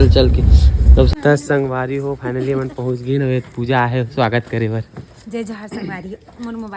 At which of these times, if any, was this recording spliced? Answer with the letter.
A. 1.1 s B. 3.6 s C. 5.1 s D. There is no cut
A